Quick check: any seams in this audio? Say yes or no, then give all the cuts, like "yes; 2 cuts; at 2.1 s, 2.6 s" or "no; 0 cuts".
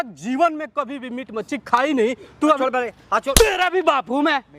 yes; 1 cut; at 2.6 s